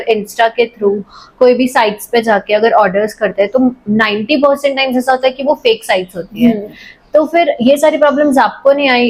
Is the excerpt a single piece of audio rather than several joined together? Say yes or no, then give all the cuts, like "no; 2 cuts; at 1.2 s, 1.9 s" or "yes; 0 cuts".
yes; 0 cuts